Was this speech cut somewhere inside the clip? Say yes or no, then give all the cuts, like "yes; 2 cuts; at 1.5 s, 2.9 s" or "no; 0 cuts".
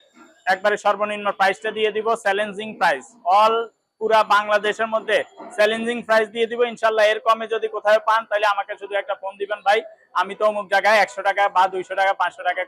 no; 0 cuts